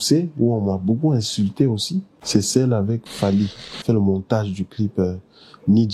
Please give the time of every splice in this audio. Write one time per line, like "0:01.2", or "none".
0:02.2
0:03.7